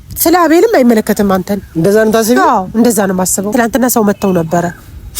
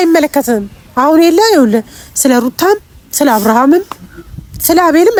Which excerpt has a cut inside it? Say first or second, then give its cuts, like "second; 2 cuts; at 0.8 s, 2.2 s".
first; 1 cut; at 3.4 s